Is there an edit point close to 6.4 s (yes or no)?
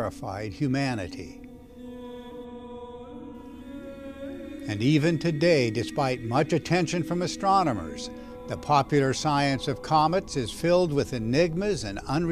no